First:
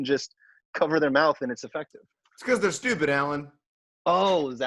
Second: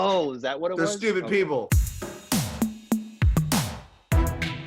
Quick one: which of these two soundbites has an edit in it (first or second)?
second